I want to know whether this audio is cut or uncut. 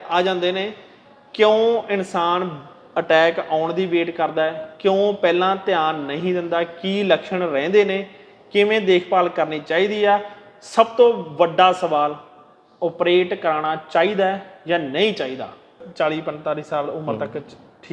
cut